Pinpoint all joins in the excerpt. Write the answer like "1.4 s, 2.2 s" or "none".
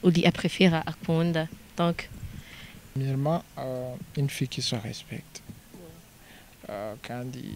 2.9 s

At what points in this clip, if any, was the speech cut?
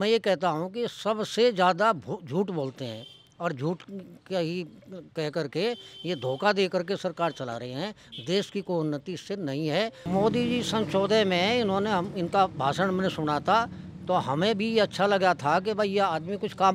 10.0 s

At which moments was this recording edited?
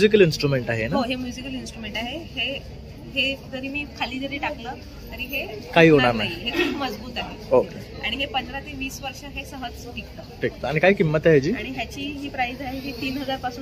none

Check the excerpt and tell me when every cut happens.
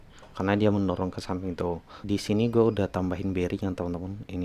2.0 s

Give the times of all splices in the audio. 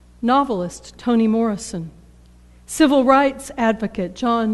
2.3 s

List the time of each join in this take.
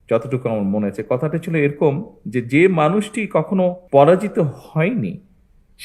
3.8 s

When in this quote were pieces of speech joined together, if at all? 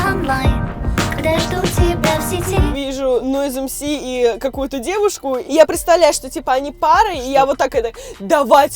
3.0 s, 5.4 s

